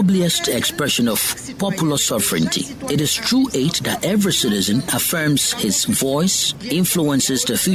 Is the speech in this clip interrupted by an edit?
yes; 1 cut; at 4.9 s

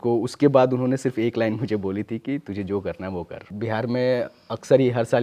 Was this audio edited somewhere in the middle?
yes; 1 cut; at 3.5 s

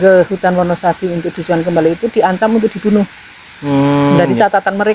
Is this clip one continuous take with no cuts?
yes; 0 cuts

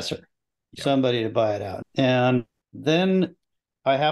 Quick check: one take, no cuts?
no; 2 cuts; at 1.7 s, 2.6 s

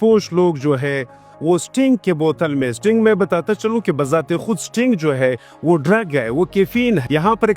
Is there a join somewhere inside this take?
no; 0 cuts

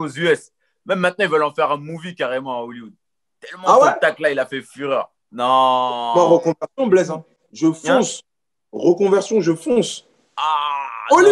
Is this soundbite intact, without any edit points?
yes; 0 cuts

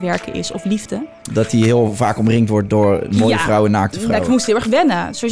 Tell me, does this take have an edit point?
yes; 1 cut; at 1.2 s

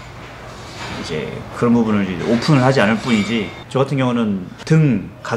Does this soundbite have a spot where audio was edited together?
yes; 1 cut; at 3.6 s

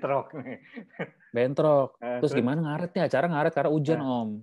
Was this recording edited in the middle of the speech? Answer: no; 0 cuts

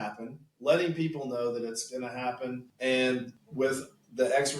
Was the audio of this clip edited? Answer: yes; 2 cuts; at 2.7 s, 3.4 s

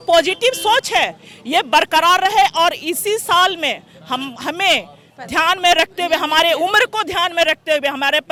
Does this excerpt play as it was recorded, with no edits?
yes; 0 cuts

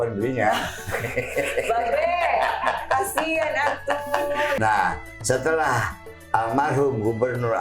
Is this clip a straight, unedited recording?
no; 1 cut; at 4.6 s

